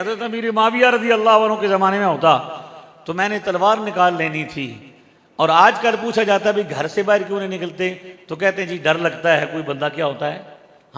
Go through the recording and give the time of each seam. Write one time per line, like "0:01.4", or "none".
none